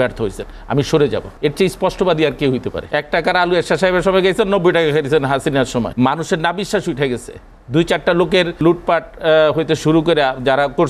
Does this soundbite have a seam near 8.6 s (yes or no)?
yes